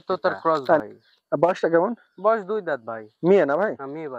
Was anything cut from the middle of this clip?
no; 0 cuts

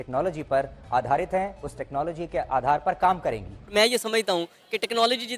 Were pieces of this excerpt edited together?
yes; 1 cut; at 3.7 s

